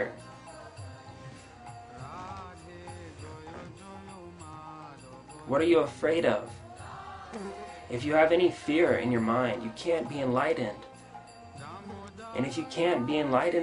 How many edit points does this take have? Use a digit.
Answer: 1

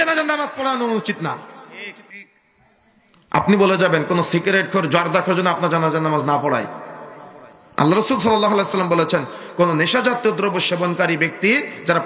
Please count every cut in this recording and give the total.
0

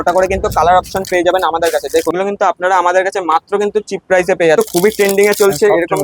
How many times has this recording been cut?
2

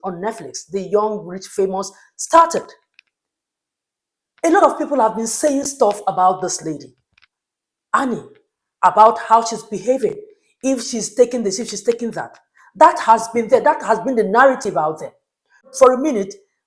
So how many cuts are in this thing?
1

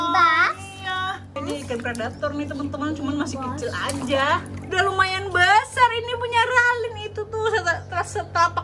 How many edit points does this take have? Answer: 2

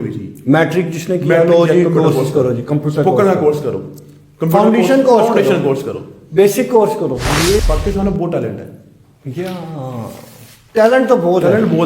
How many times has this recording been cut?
1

